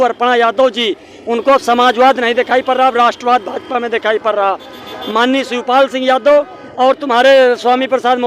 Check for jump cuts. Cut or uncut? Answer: uncut